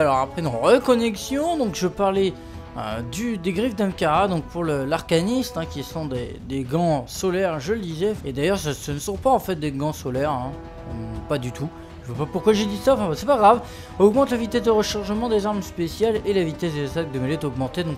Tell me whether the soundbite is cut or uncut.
cut